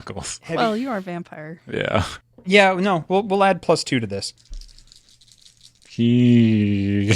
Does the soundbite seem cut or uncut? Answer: cut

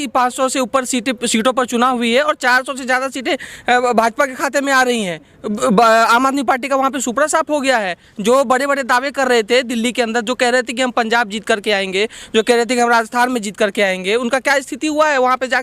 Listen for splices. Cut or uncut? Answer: uncut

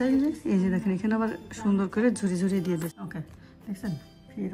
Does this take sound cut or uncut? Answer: cut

